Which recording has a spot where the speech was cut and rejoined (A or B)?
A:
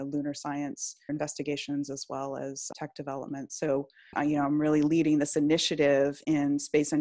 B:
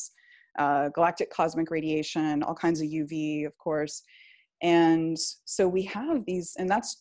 A